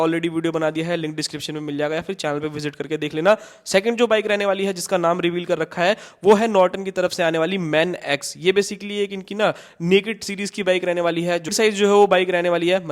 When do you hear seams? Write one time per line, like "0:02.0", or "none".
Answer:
0:11.5